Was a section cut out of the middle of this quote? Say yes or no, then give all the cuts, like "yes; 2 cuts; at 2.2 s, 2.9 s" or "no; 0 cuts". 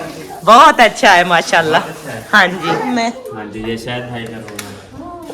yes; 1 cut; at 3.0 s